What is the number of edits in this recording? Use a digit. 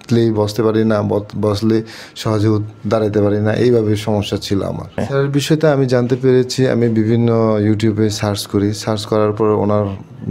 1